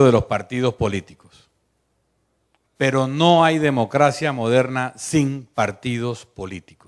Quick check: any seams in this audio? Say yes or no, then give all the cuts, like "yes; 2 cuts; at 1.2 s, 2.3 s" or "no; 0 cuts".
yes; 1 cut; at 5.7 s